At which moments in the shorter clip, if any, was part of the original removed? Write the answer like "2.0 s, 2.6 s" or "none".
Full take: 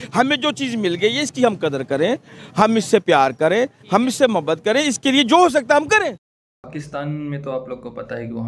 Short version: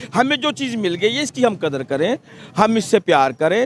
none